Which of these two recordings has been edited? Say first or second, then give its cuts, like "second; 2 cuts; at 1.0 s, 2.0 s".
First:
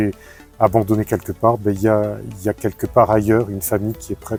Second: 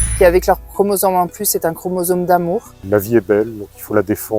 second; 1 cut; at 2.9 s